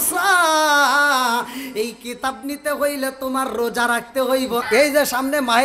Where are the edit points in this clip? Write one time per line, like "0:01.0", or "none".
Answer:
0:04.6